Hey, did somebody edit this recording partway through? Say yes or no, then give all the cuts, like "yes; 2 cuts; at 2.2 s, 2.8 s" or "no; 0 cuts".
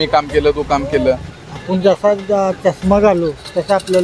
yes; 1 cut; at 1.3 s